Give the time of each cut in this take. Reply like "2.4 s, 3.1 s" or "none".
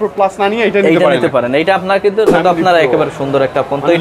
2.3 s